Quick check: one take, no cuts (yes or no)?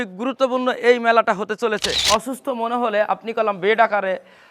no